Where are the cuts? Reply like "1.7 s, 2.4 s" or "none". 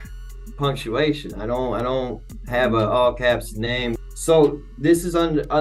2.3 s, 4.0 s